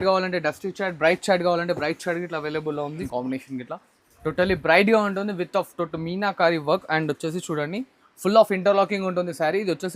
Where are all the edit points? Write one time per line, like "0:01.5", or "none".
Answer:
0:03.1